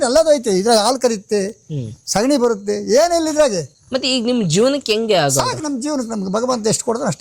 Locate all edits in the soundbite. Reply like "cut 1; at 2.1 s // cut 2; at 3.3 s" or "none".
none